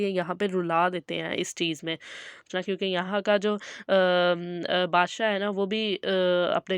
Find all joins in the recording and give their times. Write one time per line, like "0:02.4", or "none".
0:02.5